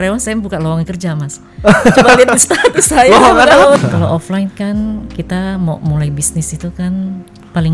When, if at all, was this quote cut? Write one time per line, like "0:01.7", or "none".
0:03.8